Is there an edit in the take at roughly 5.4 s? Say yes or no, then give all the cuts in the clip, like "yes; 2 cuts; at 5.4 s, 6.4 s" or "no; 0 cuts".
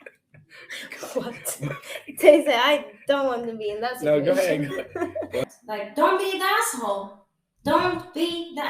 yes; 1 cut; at 5.4 s